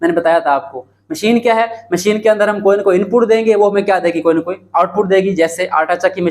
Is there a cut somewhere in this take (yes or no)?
no